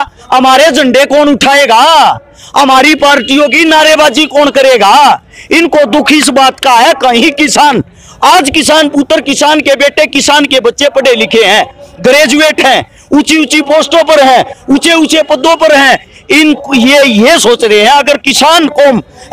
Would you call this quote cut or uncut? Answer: uncut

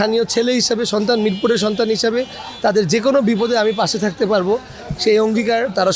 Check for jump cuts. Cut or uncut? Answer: uncut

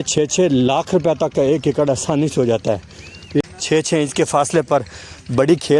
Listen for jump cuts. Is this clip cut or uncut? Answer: cut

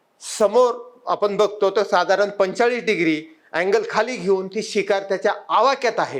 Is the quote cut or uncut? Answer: uncut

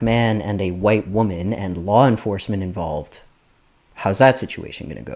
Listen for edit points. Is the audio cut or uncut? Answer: uncut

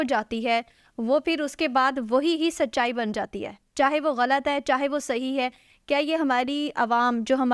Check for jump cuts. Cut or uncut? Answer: uncut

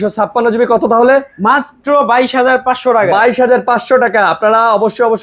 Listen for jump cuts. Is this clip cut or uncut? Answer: uncut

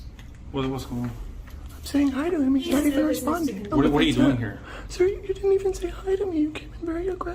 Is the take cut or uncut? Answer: cut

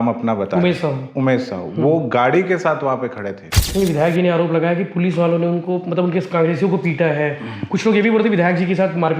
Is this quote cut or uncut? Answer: cut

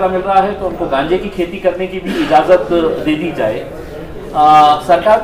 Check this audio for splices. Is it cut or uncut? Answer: uncut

